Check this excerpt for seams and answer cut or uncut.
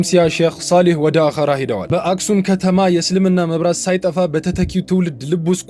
uncut